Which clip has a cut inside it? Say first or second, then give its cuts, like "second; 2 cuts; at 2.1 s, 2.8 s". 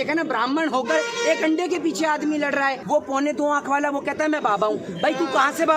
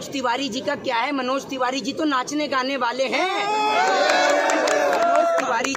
first; 1 cut; at 2.8 s